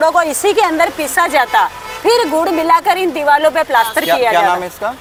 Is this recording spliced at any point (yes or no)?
no